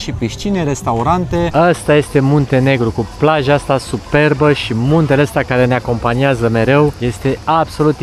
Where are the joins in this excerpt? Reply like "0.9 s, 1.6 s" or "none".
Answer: 1.5 s, 7.1 s